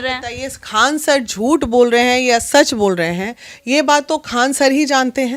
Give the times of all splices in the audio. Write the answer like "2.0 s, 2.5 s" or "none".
none